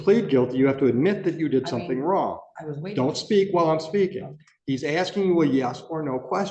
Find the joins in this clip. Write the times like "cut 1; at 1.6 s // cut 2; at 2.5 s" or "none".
none